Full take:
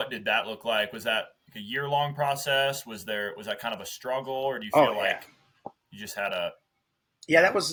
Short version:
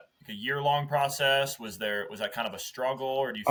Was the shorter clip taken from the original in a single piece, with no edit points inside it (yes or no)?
yes